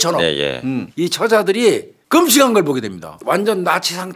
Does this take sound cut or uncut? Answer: cut